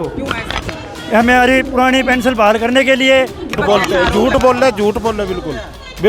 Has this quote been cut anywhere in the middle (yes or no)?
yes